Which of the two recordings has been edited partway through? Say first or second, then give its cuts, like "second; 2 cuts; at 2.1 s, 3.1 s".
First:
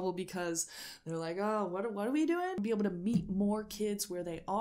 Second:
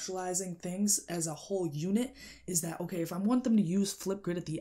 first; 1 cut; at 2.6 s